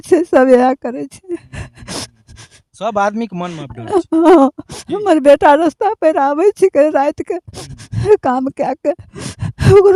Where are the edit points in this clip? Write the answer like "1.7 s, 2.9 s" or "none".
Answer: none